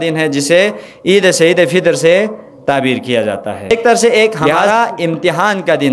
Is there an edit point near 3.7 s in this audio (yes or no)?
yes